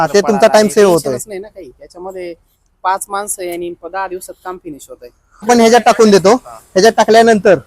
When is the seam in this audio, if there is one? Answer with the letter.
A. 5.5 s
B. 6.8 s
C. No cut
A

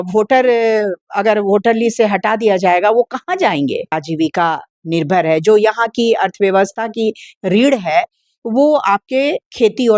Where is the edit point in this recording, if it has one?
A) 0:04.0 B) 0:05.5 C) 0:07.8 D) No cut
A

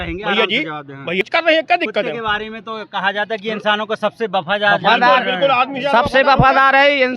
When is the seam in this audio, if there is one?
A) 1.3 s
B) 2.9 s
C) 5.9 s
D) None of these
A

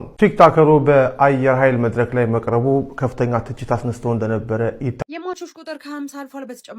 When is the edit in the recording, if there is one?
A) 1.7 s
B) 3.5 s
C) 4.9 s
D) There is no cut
C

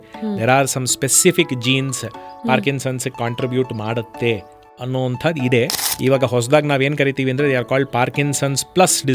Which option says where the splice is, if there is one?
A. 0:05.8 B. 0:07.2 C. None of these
A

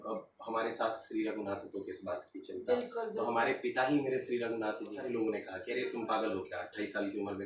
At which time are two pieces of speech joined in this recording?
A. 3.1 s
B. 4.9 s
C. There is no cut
B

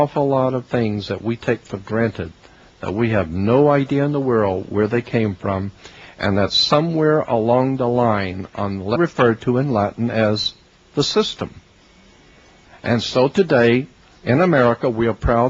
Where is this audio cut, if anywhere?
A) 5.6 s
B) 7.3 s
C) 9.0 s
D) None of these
D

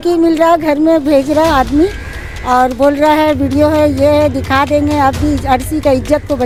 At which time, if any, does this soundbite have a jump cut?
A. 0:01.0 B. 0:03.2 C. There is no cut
C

